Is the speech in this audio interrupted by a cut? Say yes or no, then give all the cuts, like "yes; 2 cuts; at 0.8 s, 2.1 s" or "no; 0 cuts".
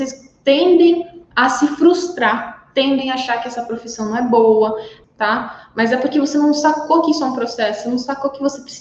yes; 1 cut; at 4.9 s